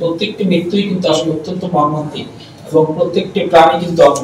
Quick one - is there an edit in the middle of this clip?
no; 0 cuts

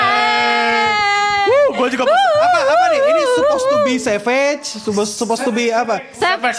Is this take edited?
no; 0 cuts

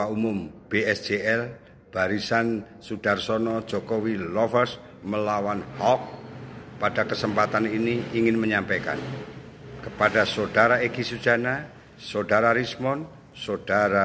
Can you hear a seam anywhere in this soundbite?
no; 0 cuts

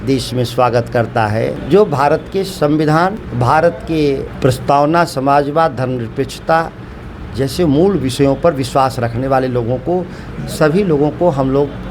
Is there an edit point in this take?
yes; 3 cuts; at 1.6 s, 3.2 s, 4.3 s

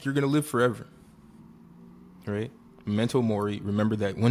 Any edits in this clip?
no; 0 cuts

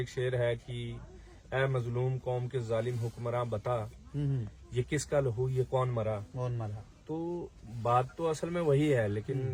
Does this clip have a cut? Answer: no; 0 cuts

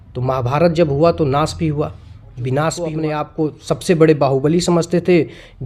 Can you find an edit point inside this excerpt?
yes; 1 cut; at 3.2 s

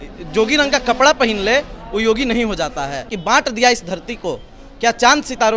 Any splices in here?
yes; 1 cut; at 3.1 s

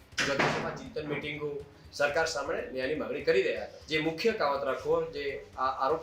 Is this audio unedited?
no; 1 cut; at 3.8 s

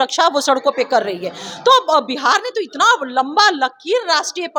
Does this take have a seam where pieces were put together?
no; 0 cuts

